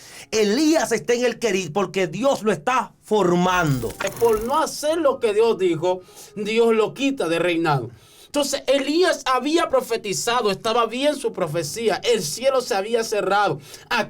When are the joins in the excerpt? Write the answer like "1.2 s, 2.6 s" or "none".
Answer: 4.0 s